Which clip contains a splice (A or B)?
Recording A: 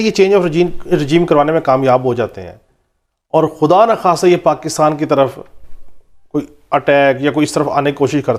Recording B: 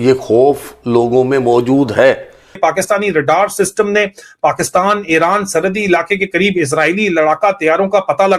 B